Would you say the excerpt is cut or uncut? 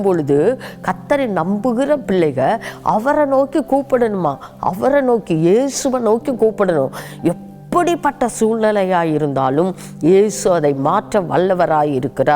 uncut